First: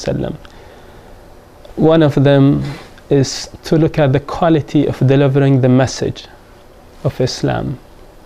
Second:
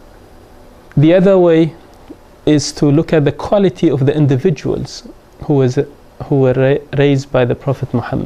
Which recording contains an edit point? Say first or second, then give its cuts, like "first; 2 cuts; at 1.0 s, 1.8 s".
second; 1 cut; at 1.4 s